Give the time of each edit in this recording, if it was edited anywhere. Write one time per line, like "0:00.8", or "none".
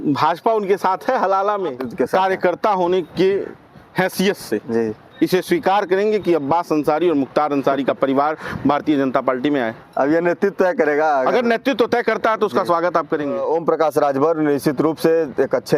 0:01.8
0:13.4